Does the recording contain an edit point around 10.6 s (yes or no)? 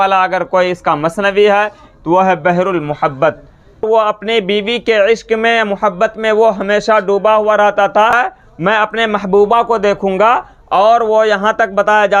no